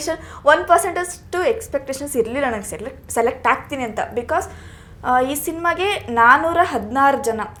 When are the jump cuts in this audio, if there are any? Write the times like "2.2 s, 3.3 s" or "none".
none